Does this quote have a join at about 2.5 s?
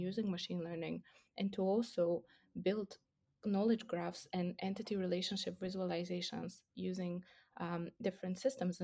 no; 0 cuts

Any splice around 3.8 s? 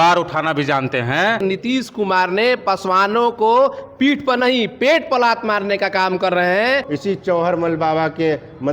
no; 2 cuts; at 1.4 s, 6.9 s

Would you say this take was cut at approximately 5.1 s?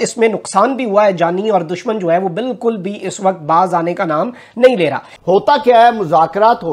yes; 1 cut; at 5.1 s

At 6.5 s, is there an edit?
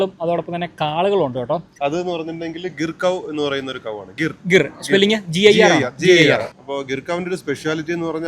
yes; 2 cuts; at 1.7 s, 6.5 s

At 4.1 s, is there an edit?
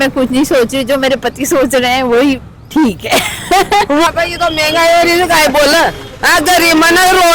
yes; 1 cut; at 4.1 s

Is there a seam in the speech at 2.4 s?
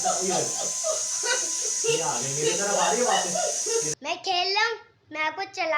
no; 1 cut; at 3.9 s

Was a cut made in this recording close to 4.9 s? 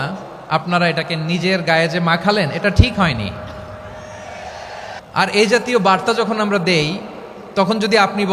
yes; 1 cut; at 4.9 s

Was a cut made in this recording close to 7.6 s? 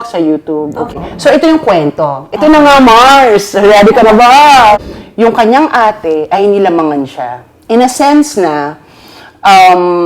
no; 2 cuts; at 0.9 s, 4.8 s

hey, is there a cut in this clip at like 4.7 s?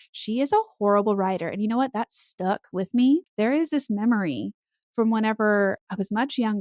no; 1 cut; at 3.3 s

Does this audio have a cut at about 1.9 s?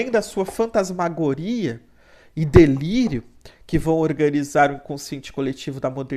no; 0 cuts

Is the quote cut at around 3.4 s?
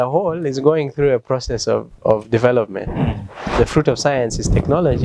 yes; 1 cut; at 3.4 s

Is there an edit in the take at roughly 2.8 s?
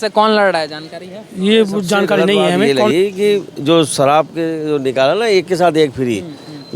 yes; 1 cut; at 2.8 s

